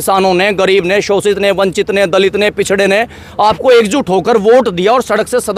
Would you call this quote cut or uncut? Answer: uncut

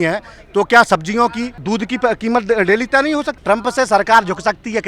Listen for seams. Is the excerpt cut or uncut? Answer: cut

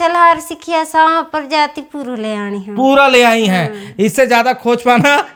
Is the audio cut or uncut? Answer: uncut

